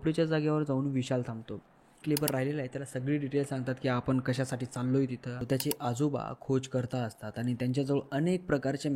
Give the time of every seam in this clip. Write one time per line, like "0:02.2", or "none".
0:02.0
0:05.4